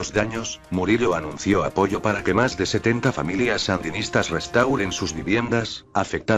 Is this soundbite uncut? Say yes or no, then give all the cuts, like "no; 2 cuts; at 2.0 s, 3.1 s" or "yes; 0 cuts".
no; 1 cut; at 1.8 s